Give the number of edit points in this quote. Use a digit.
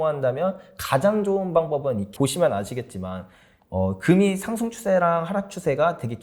1